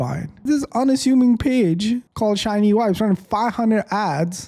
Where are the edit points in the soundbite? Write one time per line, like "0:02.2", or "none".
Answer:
none